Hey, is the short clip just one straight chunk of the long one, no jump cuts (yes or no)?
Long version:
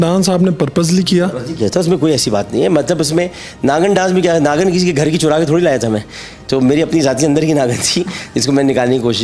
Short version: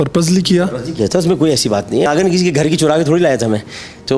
no